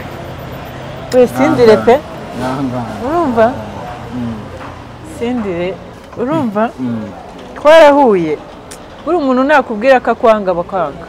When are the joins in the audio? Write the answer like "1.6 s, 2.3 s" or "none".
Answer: 6.0 s